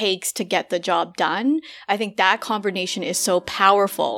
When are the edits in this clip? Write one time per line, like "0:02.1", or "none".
none